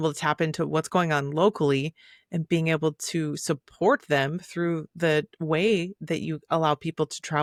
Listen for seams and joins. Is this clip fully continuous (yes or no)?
yes